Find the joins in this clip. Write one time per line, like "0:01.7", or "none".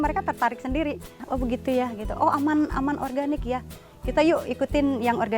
0:01.2